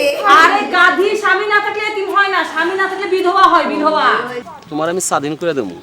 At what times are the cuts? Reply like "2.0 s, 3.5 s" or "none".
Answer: 4.4 s